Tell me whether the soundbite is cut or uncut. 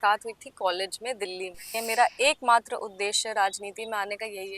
cut